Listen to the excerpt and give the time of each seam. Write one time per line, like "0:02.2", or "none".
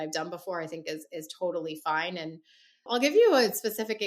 0:02.9